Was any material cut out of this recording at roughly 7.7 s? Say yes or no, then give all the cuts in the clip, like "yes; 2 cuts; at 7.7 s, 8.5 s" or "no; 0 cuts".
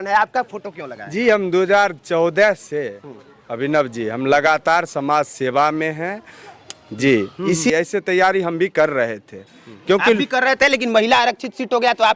yes; 1 cut; at 7.7 s